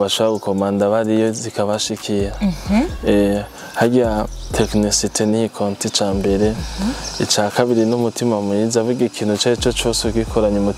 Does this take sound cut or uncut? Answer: uncut